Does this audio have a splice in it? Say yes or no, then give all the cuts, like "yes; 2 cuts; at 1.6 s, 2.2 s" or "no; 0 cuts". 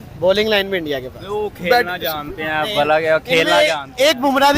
no; 0 cuts